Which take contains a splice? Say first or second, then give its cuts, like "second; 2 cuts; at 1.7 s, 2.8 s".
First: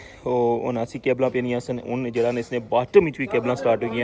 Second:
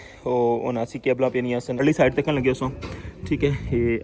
second; 1 cut; at 1.8 s